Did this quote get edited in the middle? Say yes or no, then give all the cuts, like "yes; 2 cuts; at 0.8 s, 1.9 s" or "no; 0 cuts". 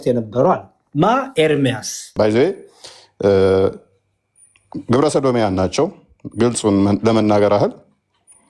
yes; 1 cut; at 2.0 s